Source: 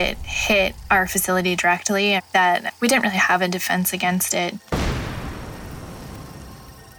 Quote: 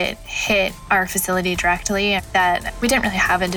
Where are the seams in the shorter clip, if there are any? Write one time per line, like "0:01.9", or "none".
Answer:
none